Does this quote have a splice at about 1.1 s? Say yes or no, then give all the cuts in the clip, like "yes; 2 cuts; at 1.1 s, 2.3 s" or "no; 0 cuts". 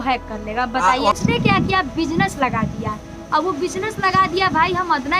yes; 1 cut; at 1.1 s